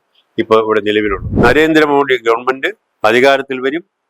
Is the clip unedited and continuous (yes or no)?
no